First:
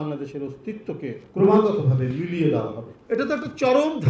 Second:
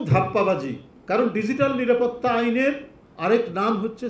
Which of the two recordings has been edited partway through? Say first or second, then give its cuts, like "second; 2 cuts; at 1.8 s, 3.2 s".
first; 2 cuts; at 1.2 s, 2.9 s